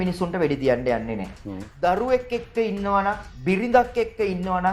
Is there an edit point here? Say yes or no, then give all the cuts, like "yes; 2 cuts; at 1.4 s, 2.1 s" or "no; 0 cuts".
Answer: no; 0 cuts